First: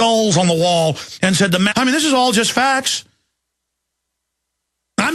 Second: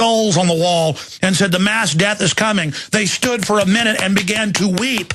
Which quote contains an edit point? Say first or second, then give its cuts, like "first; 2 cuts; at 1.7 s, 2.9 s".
second; 1 cut; at 1.7 s